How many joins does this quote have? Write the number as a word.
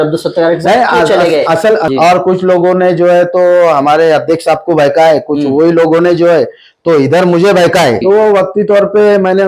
two